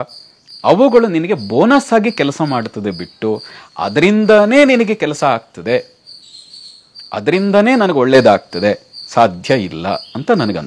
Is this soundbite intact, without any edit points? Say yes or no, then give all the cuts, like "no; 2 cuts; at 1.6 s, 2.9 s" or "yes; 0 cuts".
yes; 0 cuts